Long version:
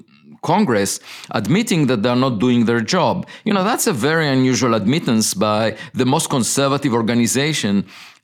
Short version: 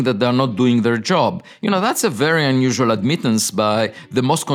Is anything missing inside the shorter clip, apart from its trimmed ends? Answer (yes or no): no